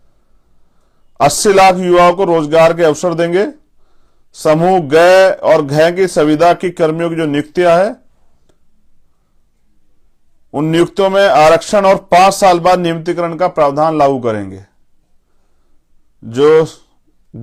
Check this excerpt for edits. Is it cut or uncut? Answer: uncut